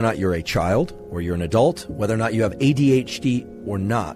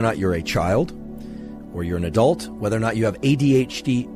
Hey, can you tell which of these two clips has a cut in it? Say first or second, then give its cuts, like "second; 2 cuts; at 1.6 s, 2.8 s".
first; 1 cut; at 1.0 s